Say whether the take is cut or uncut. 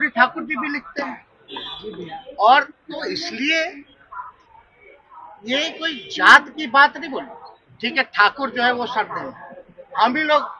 uncut